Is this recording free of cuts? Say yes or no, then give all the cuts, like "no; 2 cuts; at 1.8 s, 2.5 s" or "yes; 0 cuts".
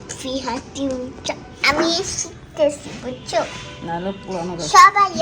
no; 1 cut; at 1.6 s